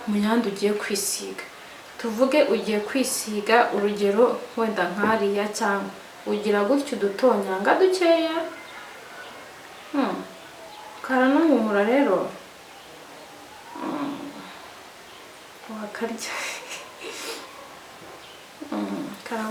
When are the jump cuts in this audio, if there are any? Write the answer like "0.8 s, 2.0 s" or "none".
none